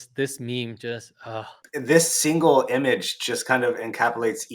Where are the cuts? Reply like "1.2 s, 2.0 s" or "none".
1.6 s